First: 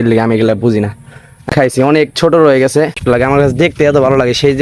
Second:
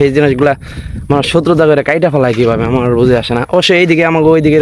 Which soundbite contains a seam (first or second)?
first